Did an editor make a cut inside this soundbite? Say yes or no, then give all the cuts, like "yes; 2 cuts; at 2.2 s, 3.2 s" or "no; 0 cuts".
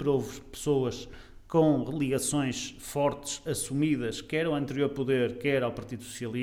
no; 0 cuts